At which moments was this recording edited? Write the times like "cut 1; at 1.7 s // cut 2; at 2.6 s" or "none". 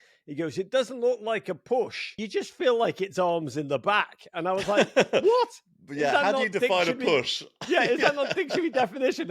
cut 1; at 2.2 s

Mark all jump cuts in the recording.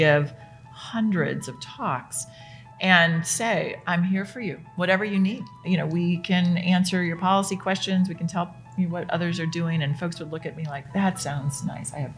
none

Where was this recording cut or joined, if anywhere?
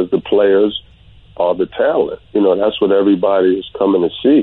cut 1; at 2.2 s

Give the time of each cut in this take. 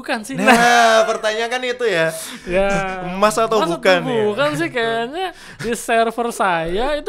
none

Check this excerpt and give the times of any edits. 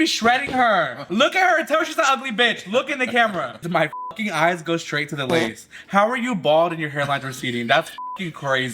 cut 1; at 1.0 s // cut 2; at 3.6 s

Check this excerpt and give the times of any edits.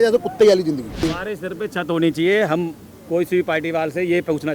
cut 1; at 1.0 s

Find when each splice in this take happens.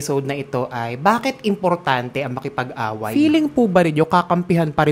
cut 1; at 3.1 s

